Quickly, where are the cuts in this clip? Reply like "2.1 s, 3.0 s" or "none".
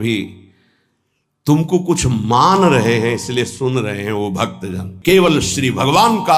4.9 s